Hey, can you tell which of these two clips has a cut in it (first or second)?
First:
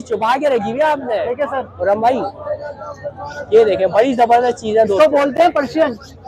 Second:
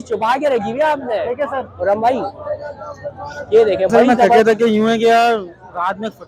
second